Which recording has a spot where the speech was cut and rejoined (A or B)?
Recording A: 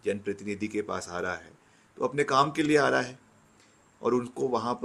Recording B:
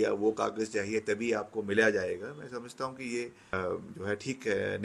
B